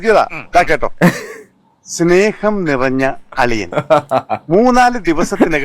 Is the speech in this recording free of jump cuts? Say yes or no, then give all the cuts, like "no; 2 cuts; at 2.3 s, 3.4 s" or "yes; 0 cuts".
yes; 0 cuts